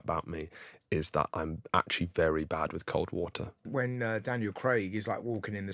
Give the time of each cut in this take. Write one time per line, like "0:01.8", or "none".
0:03.7